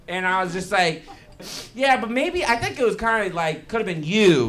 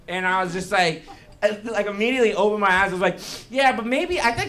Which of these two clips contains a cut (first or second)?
first